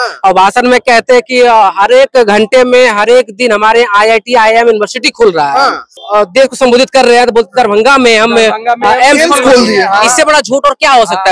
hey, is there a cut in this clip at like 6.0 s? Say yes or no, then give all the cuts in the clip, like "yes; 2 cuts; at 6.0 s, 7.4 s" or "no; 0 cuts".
yes; 1 cut; at 6.0 s